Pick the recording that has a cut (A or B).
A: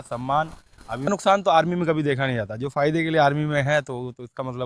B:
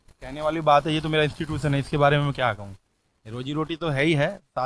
A